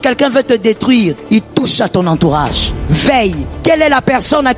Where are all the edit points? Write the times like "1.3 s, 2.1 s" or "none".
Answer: 1.2 s, 2.7 s, 3.5 s